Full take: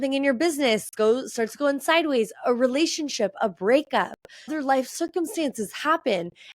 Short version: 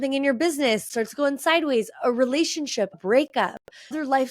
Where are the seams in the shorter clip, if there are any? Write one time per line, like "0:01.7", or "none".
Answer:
0:00.9
0:03.0